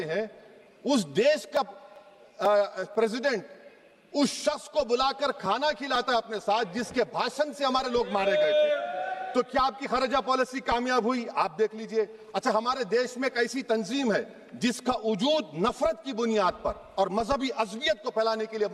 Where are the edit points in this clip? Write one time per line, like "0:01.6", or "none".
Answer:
none